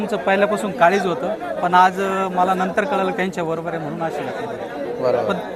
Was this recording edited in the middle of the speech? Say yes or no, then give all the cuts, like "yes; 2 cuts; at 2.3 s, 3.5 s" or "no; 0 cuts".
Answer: no; 0 cuts